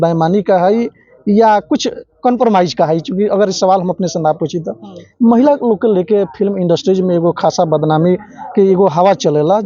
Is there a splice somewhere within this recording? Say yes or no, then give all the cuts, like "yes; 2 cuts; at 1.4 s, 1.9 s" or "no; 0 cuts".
no; 0 cuts